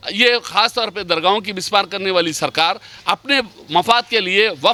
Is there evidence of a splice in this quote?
no; 0 cuts

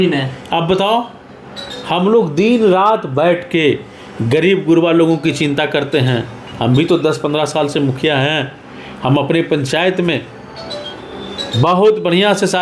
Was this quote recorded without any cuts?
yes; 0 cuts

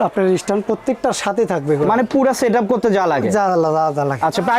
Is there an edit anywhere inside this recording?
no; 0 cuts

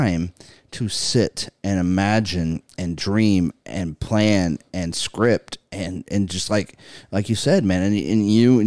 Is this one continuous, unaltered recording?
yes; 0 cuts

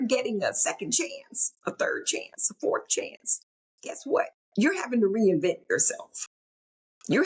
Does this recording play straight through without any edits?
yes; 0 cuts

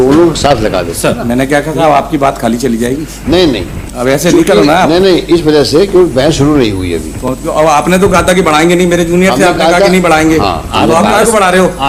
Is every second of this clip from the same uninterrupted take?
yes; 0 cuts

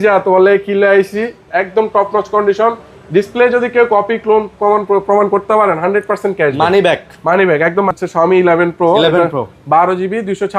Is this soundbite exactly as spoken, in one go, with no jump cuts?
no; 2 cuts; at 1.5 s, 7.9 s

